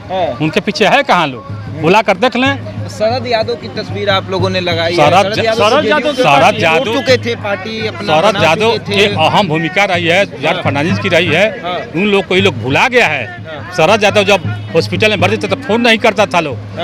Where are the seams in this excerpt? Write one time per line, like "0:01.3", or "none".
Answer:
none